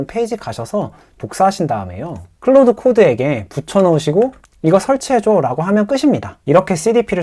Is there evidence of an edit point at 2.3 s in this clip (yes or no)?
no